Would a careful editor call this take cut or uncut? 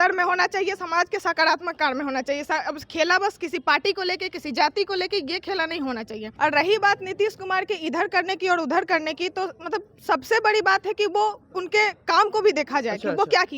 cut